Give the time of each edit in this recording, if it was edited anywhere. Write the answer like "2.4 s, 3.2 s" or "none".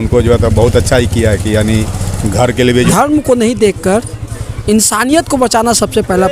2.7 s